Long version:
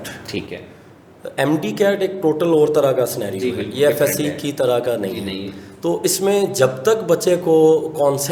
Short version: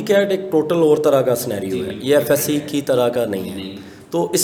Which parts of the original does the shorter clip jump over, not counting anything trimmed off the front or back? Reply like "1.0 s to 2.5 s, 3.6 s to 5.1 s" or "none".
none